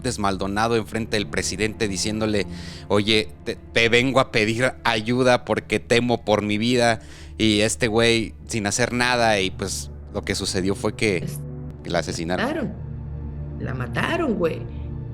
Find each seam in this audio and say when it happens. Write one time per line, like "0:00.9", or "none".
0:11.7